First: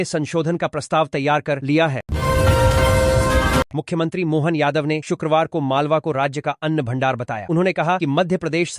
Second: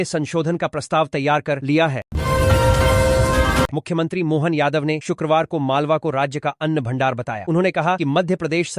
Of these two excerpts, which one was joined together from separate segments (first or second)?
second